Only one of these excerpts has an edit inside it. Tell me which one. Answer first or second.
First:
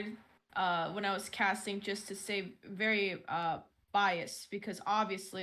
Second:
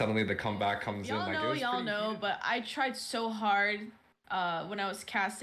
second